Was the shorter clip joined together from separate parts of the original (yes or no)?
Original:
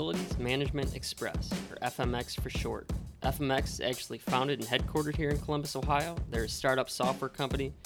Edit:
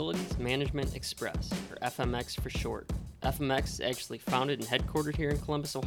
no